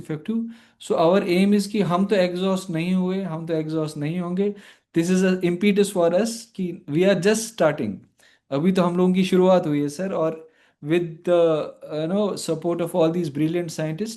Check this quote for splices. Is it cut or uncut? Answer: uncut